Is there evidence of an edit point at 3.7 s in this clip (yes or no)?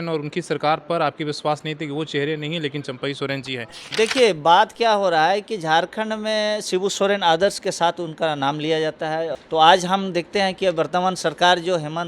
yes